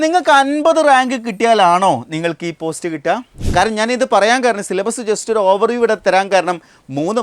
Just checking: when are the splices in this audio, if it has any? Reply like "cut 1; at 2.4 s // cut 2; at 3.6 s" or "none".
cut 1; at 3.4 s